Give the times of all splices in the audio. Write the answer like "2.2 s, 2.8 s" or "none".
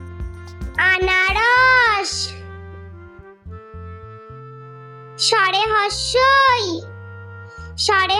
2.1 s, 4.6 s